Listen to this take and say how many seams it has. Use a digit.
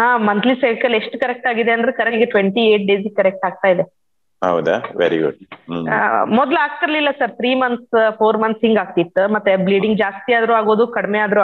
1